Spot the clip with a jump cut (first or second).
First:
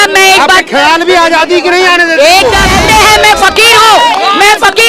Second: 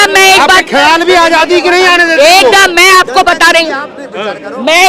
first